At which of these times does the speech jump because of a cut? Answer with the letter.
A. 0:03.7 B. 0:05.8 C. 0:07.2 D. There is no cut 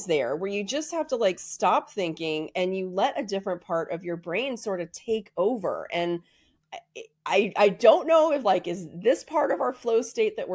D